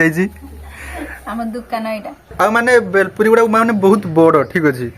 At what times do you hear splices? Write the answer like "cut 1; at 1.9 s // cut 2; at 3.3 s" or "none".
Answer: cut 1; at 2.3 s